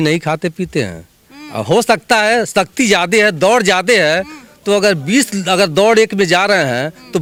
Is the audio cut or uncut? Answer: uncut